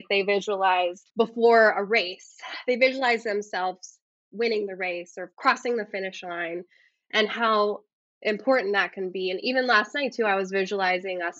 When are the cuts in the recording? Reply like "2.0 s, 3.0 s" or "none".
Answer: 1.0 s